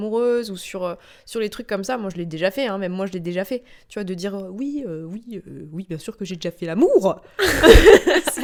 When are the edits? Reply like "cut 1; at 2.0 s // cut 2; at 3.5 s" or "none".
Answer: none